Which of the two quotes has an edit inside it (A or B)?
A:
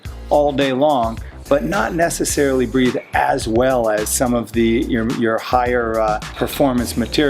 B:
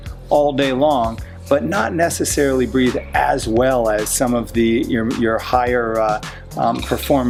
A